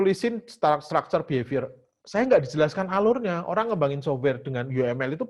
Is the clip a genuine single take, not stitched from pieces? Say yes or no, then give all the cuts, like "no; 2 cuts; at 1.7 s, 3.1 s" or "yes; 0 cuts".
yes; 0 cuts